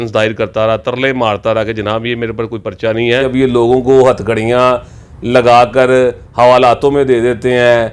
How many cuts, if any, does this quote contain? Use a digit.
1